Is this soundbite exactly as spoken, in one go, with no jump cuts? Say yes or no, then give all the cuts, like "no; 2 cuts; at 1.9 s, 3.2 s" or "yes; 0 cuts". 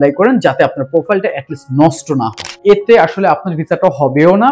no; 1 cut; at 2.4 s